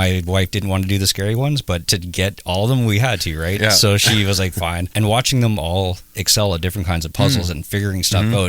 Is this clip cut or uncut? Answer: cut